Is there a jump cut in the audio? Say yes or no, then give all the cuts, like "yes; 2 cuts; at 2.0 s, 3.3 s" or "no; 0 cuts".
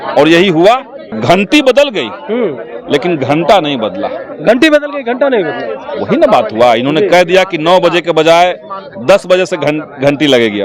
yes; 1 cut; at 1.0 s